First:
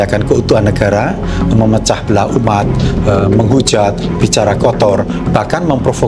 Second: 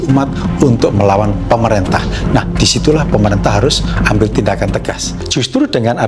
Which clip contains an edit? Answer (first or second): second